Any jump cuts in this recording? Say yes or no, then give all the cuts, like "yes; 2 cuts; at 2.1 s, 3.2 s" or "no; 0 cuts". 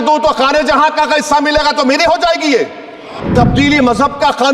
yes; 1 cut; at 3.2 s